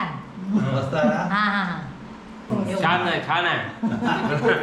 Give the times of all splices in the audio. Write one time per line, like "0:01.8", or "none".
0:02.5